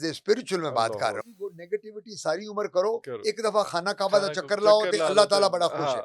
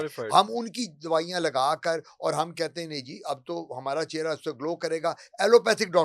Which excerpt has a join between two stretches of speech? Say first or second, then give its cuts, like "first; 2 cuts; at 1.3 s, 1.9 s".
first; 1 cut; at 1.3 s